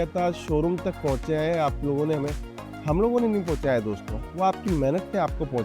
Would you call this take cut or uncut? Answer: uncut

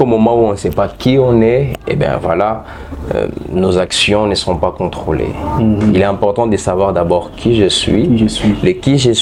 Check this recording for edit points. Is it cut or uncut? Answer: uncut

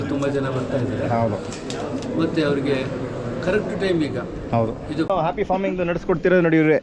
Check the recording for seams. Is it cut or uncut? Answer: cut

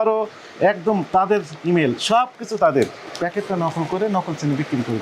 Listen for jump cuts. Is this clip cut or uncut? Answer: cut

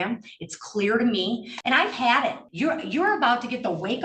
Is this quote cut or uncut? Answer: cut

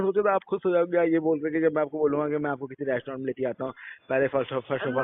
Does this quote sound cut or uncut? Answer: uncut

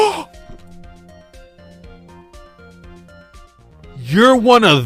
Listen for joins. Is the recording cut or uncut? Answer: uncut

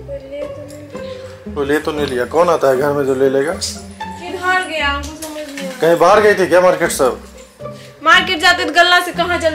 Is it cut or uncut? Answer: uncut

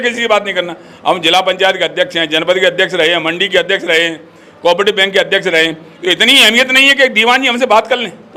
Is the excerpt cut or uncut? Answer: uncut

